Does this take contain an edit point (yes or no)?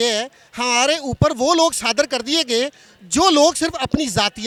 no